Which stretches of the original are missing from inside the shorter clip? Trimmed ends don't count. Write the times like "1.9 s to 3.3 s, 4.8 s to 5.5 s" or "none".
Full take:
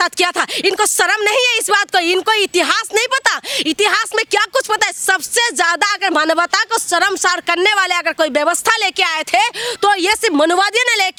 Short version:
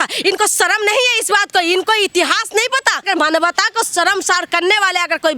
3.4 s to 6.0 s

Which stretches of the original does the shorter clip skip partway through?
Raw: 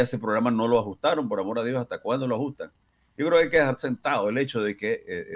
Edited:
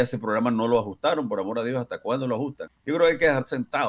2.7 s to 3.0 s

